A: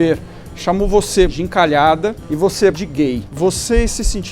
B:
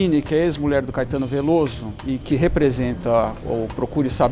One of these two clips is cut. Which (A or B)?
A